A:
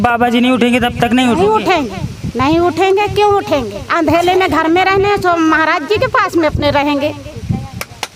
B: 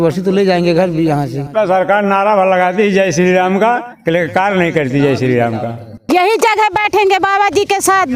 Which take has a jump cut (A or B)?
B